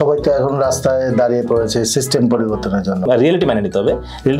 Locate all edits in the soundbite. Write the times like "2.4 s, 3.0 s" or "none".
3.0 s